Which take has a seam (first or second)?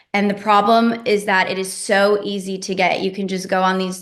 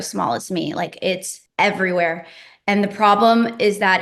second